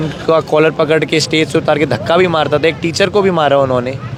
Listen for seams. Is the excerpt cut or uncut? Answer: uncut